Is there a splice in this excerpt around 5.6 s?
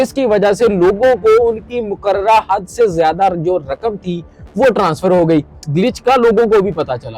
yes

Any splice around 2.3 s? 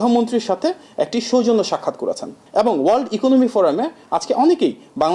yes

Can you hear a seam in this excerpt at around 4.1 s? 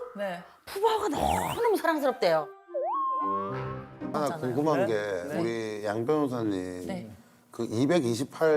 yes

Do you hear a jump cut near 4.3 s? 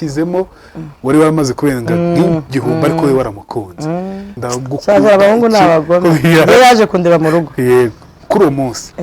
yes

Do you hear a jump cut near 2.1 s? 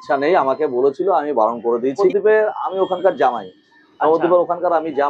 yes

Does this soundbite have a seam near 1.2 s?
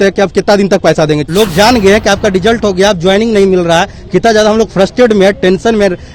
yes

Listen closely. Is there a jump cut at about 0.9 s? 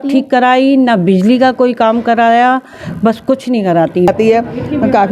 no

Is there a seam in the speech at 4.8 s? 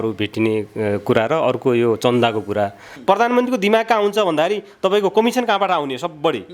no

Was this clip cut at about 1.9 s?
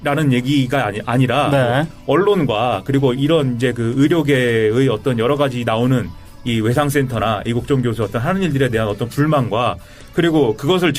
yes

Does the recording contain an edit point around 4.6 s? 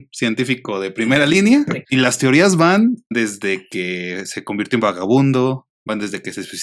no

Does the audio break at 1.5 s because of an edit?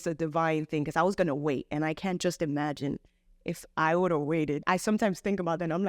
no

